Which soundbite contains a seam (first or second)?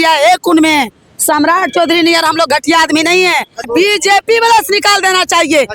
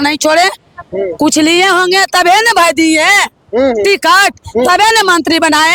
first